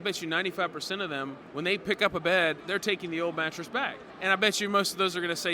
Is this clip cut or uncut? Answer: cut